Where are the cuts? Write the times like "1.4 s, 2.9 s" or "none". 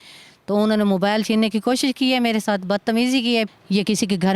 3.5 s